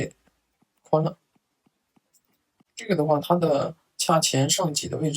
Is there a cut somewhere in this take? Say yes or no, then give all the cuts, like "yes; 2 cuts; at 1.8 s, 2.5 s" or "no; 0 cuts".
yes; 1 cut; at 2.7 s